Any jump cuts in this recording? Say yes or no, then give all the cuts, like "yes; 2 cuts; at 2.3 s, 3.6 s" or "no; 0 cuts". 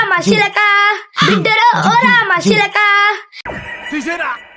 no; 0 cuts